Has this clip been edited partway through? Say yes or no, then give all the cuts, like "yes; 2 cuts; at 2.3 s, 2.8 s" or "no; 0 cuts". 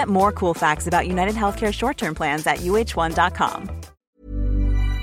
yes; 1 cut; at 4.0 s